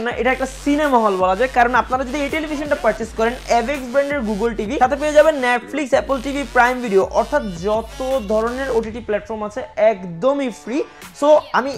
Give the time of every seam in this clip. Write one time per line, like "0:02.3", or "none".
none